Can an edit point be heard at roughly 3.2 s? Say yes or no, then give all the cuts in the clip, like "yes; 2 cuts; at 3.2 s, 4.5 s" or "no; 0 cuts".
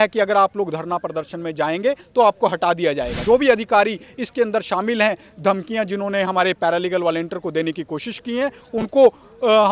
yes; 1 cut; at 3.2 s